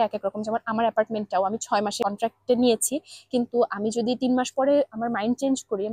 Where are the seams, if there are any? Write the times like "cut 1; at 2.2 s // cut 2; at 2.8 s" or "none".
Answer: cut 1; at 2.0 s